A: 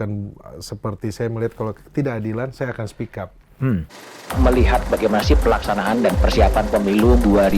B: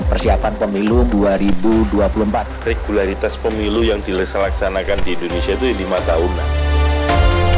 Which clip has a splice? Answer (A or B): A